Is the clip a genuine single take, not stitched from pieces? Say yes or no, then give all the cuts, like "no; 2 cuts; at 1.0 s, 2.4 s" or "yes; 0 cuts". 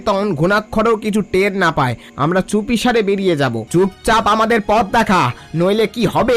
no; 1 cut; at 3.6 s